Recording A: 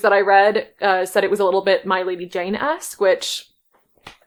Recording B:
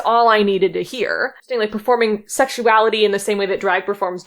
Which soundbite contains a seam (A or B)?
B